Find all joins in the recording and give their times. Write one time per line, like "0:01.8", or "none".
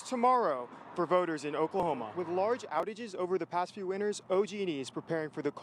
0:02.2